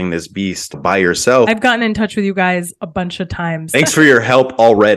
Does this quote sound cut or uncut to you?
cut